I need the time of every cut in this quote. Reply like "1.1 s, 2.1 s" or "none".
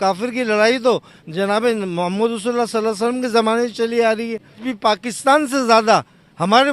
4.6 s